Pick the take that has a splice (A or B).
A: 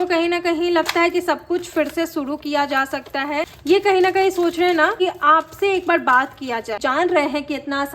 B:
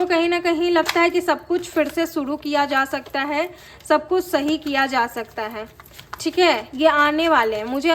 A